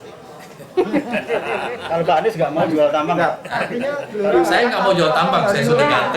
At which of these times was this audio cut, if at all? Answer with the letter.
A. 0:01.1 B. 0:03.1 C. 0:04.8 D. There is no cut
D